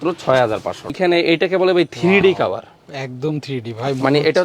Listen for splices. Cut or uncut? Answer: cut